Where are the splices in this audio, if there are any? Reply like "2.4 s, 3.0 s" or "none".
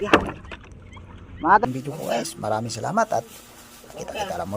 1.6 s